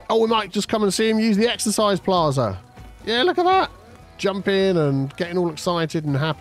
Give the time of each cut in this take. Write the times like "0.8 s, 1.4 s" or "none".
none